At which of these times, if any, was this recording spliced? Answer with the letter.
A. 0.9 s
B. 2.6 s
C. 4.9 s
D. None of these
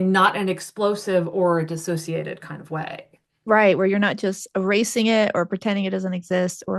D